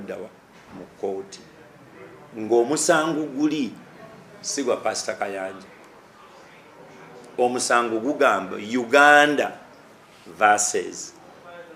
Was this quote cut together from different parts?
no; 0 cuts

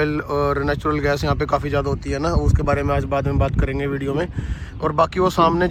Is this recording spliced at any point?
no; 0 cuts

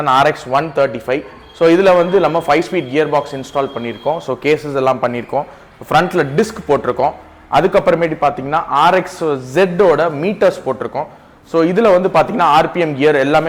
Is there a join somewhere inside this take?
no; 0 cuts

